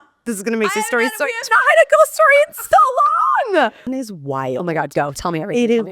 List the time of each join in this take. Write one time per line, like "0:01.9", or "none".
0:03.8